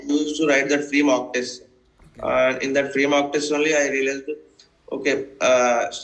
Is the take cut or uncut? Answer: uncut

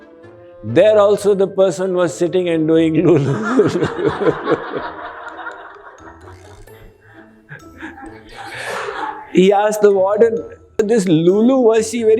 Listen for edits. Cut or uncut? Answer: cut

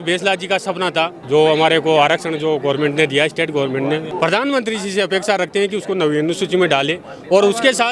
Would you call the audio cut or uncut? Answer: cut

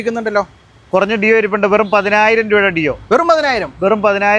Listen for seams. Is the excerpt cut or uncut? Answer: uncut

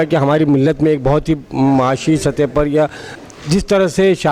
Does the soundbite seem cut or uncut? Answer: cut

